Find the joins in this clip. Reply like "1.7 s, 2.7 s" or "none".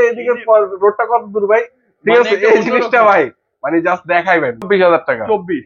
4.7 s